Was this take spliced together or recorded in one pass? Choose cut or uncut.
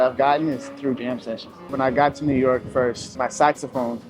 cut